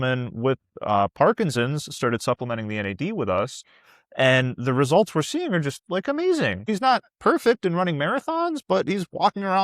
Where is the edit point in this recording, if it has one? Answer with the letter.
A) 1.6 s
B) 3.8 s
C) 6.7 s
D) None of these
C